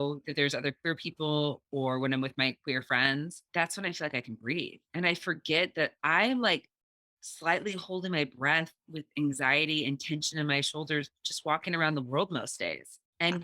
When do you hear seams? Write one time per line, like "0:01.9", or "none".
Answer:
0:03.4